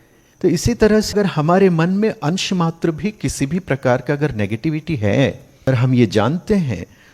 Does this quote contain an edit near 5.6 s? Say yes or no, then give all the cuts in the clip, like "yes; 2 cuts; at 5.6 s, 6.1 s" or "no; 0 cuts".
yes; 2 cuts; at 1.1 s, 5.6 s